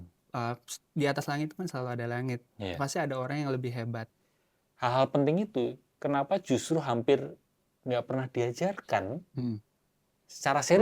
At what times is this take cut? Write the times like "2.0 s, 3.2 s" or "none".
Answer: 4.1 s